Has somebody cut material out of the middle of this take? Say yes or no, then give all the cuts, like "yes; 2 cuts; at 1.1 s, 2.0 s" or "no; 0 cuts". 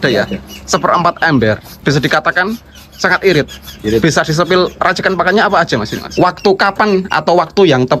yes; 1 cut; at 6.0 s